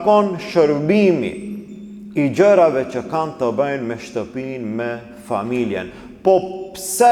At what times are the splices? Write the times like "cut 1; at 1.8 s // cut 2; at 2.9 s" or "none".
none

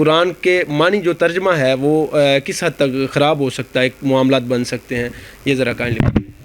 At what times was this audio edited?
none

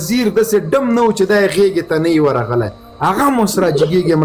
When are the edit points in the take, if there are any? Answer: none

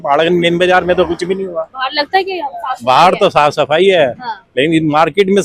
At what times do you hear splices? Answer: none

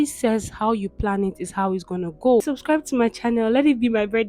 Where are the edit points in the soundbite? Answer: cut 1; at 2.4 s

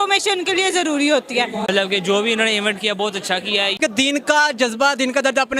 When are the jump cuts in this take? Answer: cut 1; at 1.7 s // cut 2; at 3.8 s

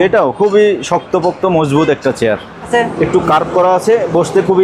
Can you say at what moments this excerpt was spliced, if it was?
cut 1; at 2.7 s

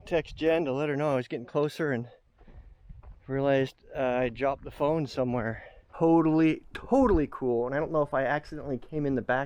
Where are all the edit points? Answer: cut 1; at 5.9 s

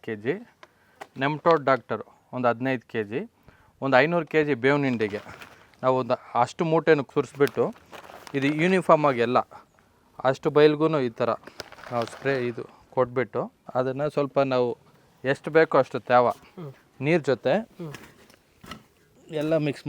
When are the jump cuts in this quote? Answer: cut 1; at 7.1 s

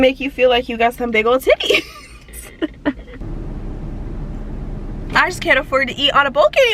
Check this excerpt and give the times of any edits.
cut 1; at 3.1 s

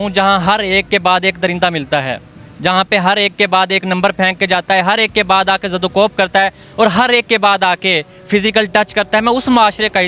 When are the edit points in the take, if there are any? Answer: none

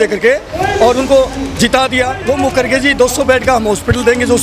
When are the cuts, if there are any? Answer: cut 1; at 2.2 s

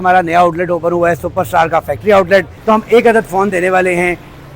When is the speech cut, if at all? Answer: cut 1; at 2.5 s

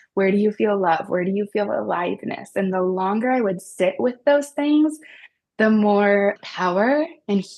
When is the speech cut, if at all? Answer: cut 1; at 6.4 s

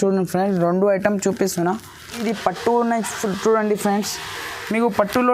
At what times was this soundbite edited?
cut 1; at 2.2 s

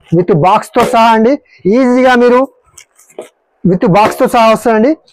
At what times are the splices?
none

